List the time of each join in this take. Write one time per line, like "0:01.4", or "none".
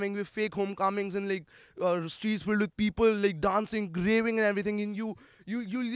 none